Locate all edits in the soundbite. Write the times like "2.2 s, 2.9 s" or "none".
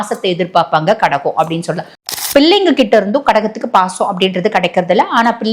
1.9 s